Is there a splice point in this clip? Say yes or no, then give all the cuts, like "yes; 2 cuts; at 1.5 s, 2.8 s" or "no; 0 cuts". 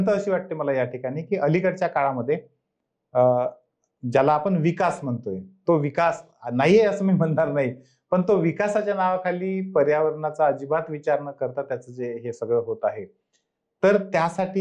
no; 0 cuts